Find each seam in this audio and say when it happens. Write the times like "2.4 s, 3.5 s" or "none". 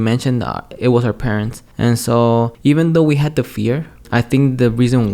1.6 s, 2.5 s, 4.0 s